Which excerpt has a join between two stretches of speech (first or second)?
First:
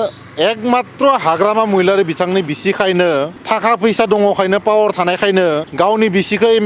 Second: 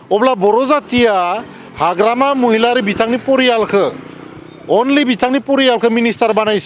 first